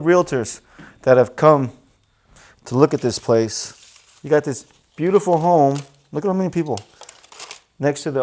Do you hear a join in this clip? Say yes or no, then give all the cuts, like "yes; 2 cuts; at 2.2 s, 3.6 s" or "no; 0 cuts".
no; 0 cuts